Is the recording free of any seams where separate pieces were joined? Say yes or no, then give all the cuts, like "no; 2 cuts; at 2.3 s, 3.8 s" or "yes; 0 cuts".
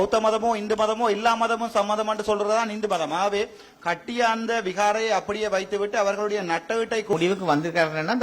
no; 1 cut; at 7.1 s